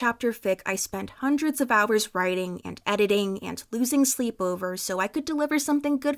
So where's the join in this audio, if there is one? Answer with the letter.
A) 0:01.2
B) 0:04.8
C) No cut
C